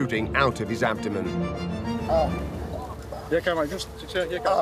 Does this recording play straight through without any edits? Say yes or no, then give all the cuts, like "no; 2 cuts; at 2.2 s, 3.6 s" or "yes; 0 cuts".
yes; 0 cuts